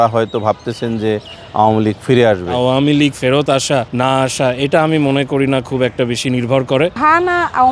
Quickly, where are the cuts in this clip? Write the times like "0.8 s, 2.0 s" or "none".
2.5 s, 3.9 s, 7.0 s